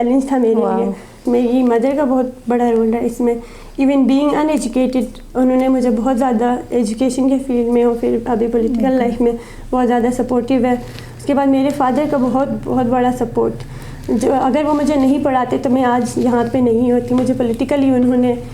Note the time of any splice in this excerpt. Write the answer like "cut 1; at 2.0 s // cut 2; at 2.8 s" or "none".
cut 1; at 1.2 s